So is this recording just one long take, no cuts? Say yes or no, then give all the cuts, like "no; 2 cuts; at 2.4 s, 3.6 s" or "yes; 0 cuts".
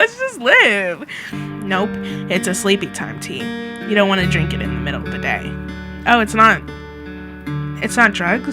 no; 1 cut; at 1.3 s